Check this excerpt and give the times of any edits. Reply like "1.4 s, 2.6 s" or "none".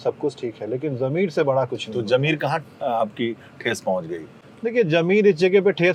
none

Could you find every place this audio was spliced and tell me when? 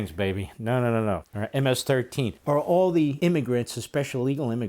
1.3 s, 2.4 s, 3.1 s

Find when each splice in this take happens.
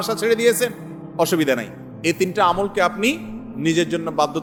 none

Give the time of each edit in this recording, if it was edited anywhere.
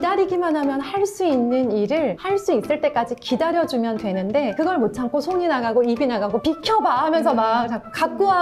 6.4 s

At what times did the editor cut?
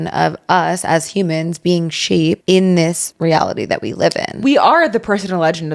2.4 s, 3.1 s, 4.3 s

